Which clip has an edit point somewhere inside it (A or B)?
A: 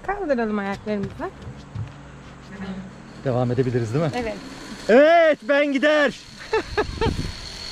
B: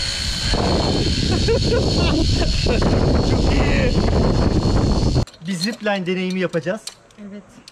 B